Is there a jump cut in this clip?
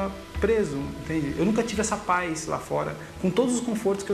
no; 0 cuts

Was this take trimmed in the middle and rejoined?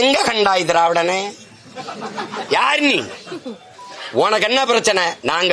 no; 0 cuts

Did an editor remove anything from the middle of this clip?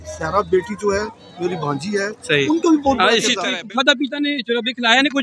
yes; 1 cut; at 3.4 s

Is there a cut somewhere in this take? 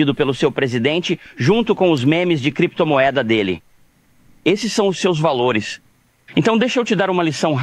no; 0 cuts

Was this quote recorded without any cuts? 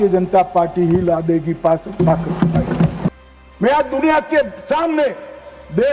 no; 1 cut; at 3.1 s

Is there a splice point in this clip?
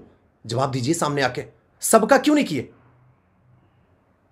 no; 0 cuts

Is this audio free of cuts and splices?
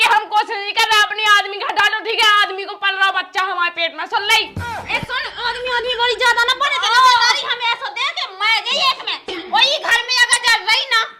no; 1 cut; at 9.3 s

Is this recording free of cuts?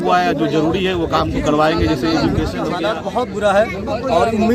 no; 1 cut; at 2.8 s

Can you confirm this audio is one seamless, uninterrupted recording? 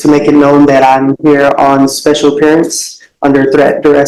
yes; 0 cuts

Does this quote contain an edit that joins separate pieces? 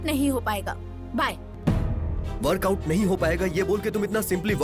yes; 1 cut; at 1.5 s

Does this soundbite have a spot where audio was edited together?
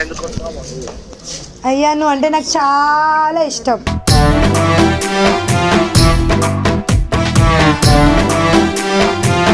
no; 0 cuts

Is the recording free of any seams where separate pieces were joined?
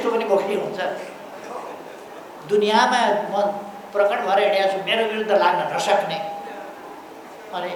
yes; 0 cuts

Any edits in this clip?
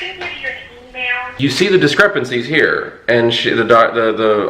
yes; 1 cut; at 1.2 s

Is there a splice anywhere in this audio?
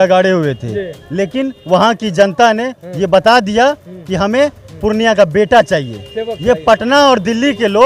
no; 0 cuts

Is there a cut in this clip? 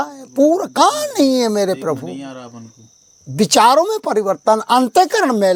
no; 0 cuts

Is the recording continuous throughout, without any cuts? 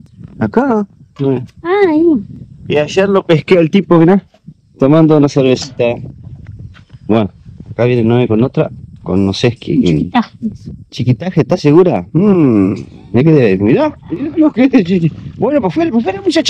yes; 0 cuts

